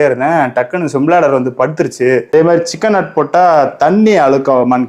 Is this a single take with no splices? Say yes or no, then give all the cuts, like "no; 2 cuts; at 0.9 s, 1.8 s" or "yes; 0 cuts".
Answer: no; 1 cut; at 2.3 s